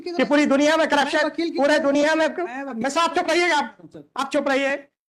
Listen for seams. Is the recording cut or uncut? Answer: uncut